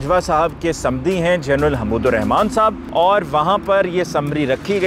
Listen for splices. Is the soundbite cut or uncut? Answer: cut